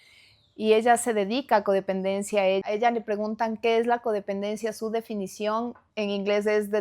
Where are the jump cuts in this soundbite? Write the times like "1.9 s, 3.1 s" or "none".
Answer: 2.6 s, 5.8 s